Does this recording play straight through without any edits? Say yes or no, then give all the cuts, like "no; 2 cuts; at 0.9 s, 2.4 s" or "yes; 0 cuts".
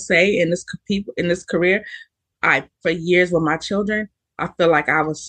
yes; 0 cuts